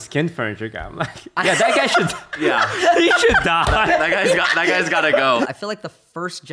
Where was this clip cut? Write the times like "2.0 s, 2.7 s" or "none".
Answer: 5.4 s